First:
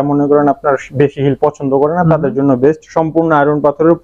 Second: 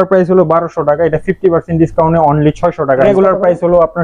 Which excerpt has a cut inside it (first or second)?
second